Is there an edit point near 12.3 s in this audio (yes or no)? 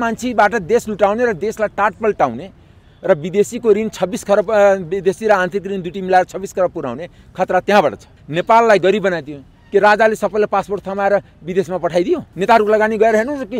yes